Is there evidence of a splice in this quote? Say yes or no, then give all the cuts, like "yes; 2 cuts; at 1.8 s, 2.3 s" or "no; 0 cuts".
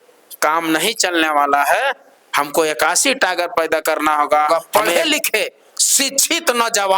yes; 1 cut; at 4.5 s